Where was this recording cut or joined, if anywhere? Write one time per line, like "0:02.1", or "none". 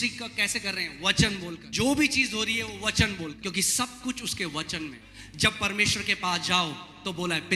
0:01.6
0:03.4
0:05.1